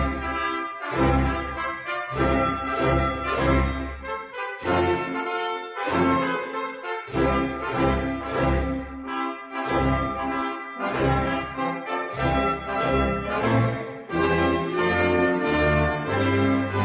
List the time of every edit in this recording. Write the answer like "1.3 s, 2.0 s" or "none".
none